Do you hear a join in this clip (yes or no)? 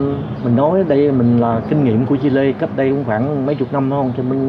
no